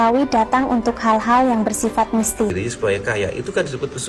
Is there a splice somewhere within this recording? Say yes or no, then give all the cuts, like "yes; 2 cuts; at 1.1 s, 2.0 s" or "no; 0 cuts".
yes; 1 cut; at 2.6 s